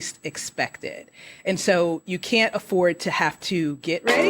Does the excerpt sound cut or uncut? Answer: uncut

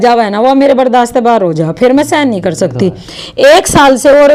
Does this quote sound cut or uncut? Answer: uncut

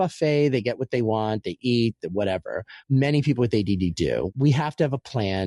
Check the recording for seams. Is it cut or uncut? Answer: cut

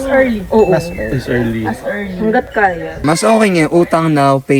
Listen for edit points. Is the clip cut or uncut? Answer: cut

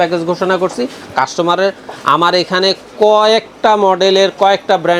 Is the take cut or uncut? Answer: uncut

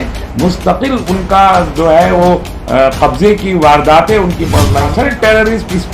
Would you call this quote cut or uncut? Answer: cut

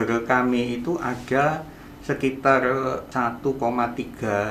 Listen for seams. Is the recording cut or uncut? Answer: cut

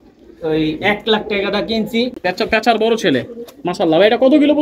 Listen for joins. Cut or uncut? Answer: cut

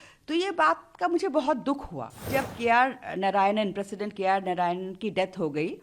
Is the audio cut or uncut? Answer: cut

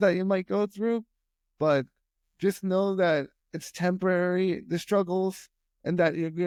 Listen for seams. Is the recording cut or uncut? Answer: uncut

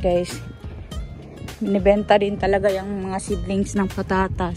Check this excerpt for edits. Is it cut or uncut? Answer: uncut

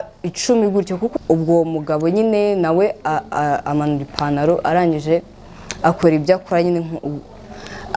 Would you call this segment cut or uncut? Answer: cut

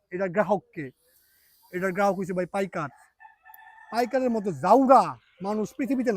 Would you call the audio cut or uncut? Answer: uncut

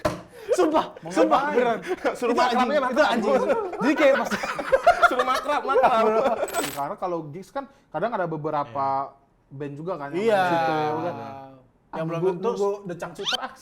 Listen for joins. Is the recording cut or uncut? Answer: cut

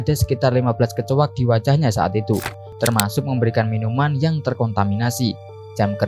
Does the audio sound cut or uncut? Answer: cut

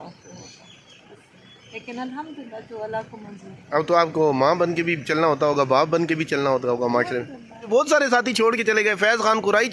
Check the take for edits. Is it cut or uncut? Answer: cut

